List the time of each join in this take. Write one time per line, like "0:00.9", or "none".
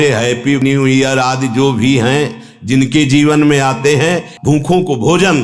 0:04.3